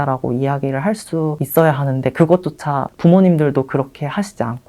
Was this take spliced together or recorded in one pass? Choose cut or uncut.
cut